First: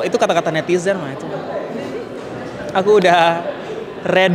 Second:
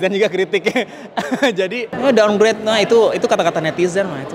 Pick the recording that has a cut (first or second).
second